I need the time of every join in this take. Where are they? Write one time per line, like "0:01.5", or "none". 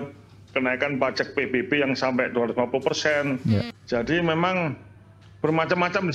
0:03.7